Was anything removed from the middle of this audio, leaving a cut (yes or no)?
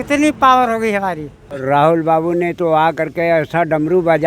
yes